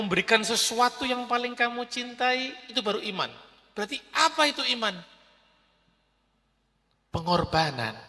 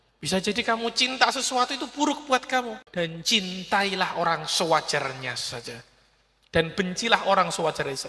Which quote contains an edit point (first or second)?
second